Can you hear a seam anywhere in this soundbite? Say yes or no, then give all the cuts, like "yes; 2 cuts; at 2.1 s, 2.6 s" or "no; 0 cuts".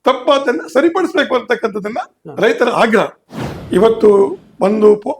yes; 1 cut; at 3.2 s